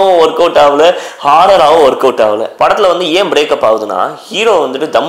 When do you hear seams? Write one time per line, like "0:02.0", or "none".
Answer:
0:02.5